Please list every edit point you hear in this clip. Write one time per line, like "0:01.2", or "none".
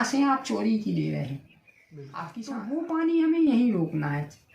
0:02.1